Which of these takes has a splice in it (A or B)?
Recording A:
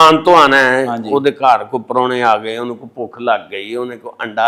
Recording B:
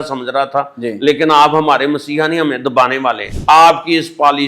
B